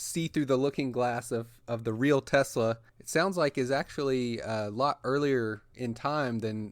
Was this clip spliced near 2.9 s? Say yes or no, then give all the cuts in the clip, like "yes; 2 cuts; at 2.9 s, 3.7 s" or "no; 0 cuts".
yes; 2 cuts; at 2.9 s, 5.7 s